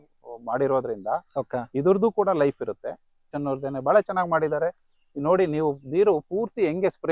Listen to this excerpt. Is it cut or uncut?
cut